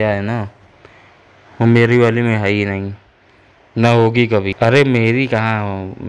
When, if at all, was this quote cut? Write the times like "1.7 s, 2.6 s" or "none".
3.4 s, 4.5 s